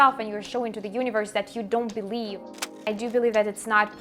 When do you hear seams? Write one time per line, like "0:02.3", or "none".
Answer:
0:02.8